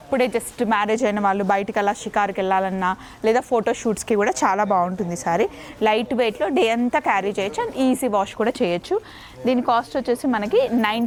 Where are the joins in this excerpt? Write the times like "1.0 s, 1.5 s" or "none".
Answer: none